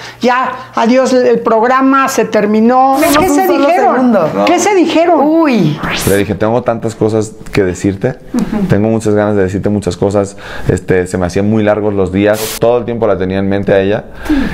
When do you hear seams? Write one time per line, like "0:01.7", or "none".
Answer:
0:03.0
0:05.9
0:12.5